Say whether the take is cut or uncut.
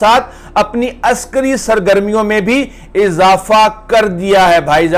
uncut